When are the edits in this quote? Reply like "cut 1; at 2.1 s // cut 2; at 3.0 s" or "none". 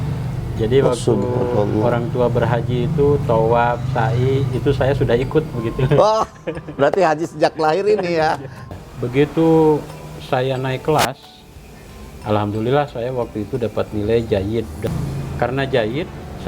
cut 1; at 8.7 s // cut 2; at 14.9 s